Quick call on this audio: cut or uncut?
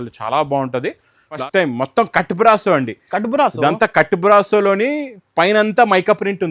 cut